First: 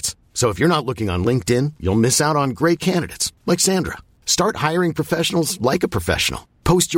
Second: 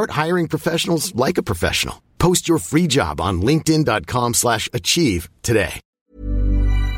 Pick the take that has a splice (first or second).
second